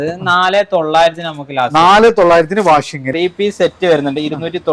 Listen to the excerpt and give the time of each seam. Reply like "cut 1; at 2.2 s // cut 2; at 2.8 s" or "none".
cut 1; at 3.0 s